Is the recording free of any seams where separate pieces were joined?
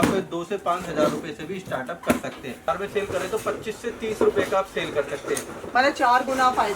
no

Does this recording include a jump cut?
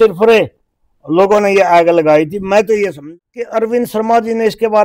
yes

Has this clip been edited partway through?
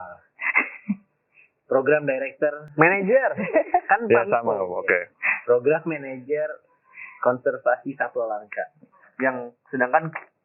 yes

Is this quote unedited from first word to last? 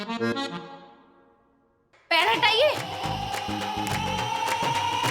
yes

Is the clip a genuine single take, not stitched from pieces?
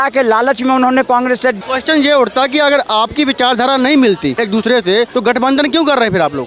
no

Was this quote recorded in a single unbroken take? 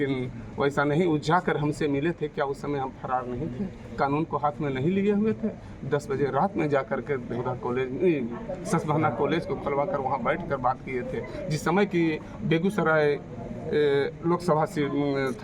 yes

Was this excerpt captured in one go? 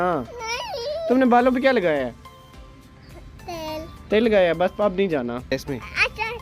no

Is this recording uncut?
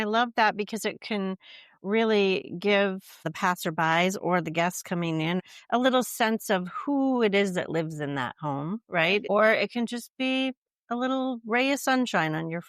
no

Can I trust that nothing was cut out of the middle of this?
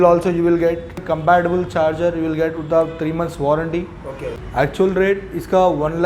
no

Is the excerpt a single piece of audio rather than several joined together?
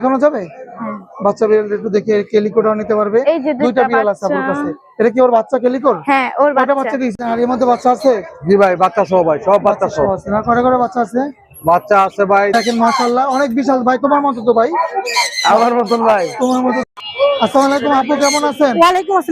no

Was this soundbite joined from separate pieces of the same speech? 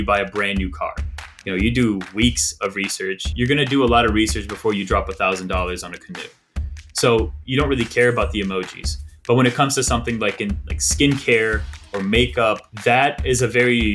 yes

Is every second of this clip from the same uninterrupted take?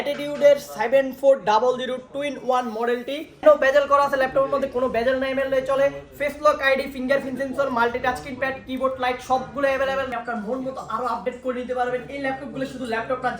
no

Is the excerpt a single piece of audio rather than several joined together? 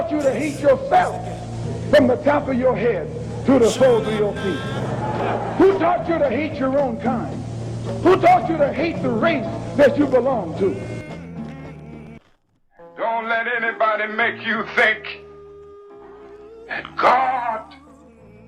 no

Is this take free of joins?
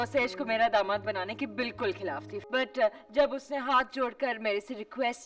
no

